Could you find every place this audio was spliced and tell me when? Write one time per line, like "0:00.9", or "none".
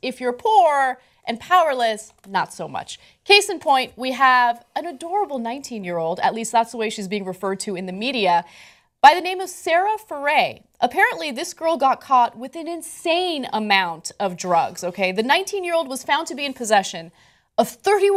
none